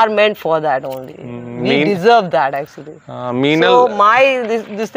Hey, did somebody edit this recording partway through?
no; 0 cuts

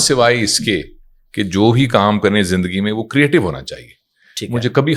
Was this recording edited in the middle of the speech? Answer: no; 0 cuts

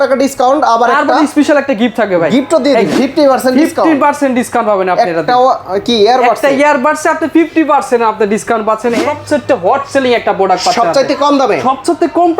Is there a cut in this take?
yes; 2 cuts; at 2.9 s, 8.9 s

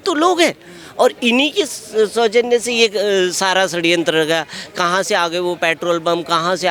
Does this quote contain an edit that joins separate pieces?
no; 0 cuts

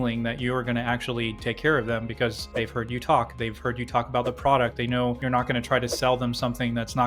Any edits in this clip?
no; 0 cuts

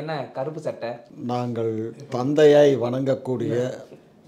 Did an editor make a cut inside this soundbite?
no; 0 cuts

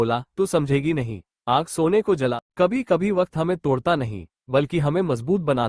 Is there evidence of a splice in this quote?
yes; 1 cut; at 2.3 s

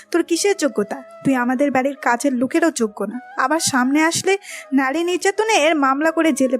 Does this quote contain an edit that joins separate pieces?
yes; 1 cut; at 1.0 s

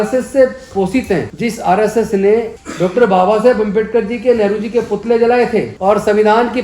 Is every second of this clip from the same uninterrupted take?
no; 3 cuts; at 1.3 s, 2.6 s, 5.7 s

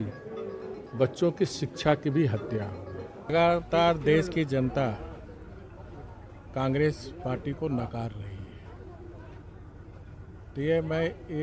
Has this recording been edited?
yes; 1 cut; at 3.3 s

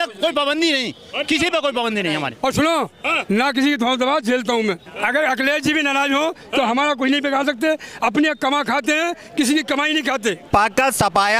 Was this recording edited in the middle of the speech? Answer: yes; 3 cuts; at 2.3 s, 4.9 s, 10.5 s

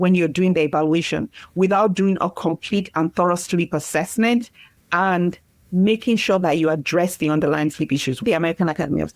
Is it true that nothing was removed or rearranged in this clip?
no; 1 cut; at 8.2 s

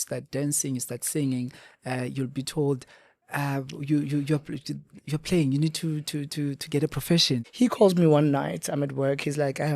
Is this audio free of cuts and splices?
no; 1 cut; at 7.4 s

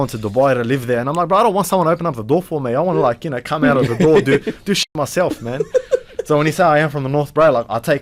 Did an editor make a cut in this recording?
no; 0 cuts

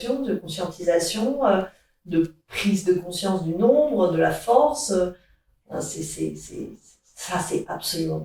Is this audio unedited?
yes; 0 cuts

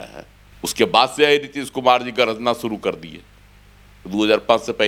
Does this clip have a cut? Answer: no; 0 cuts

